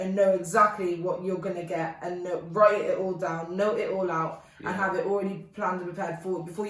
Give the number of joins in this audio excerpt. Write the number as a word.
zero